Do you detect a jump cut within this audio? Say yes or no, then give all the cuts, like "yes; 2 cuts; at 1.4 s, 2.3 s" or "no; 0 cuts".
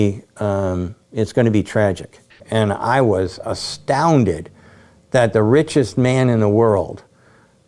yes; 1 cut; at 2.3 s